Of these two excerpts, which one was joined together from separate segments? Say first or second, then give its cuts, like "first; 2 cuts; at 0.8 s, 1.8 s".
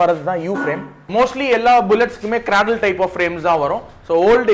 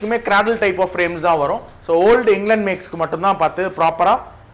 first; 1 cut; at 1.1 s